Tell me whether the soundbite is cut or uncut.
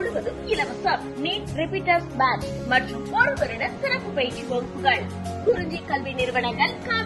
uncut